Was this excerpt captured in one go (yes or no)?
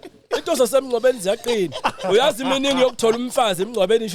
yes